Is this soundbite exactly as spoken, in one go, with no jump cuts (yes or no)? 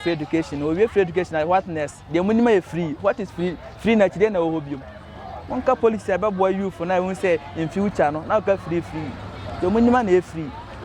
yes